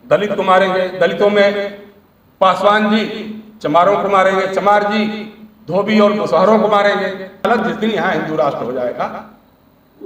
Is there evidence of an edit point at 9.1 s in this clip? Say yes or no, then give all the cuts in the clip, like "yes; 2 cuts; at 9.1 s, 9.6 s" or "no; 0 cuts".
no; 1 cut; at 7.4 s